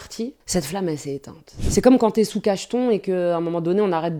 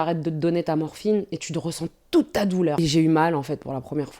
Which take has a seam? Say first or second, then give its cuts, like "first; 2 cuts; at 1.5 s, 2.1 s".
second; 1 cut; at 2.8 s